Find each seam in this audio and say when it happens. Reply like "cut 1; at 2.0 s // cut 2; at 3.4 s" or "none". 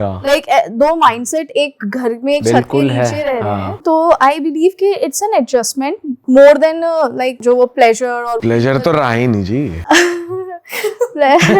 cut 1; at 6.1 s // cut 2; at 7.4 s // cut 3; at 8.4 s // cut 4; at 9.8 s